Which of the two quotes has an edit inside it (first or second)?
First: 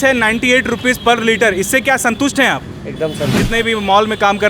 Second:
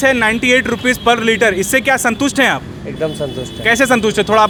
first